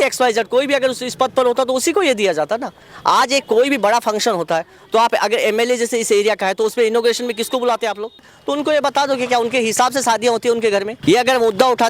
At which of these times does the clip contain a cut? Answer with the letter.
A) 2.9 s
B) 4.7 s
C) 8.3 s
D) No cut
C